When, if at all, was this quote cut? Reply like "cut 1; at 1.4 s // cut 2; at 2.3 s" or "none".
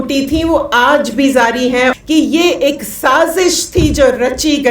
cut 1; at 2.0 s